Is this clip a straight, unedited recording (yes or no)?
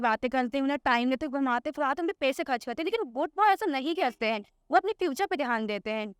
yes